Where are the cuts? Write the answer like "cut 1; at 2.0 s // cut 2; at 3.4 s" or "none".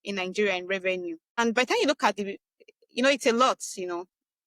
cut 1; at 1.4 s